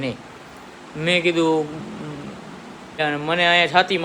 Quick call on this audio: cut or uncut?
cut